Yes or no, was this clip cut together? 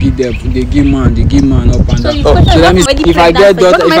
yes